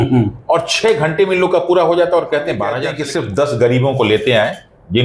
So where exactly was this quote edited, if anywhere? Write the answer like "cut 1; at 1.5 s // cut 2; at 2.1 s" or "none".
cut 1; at 2.9 s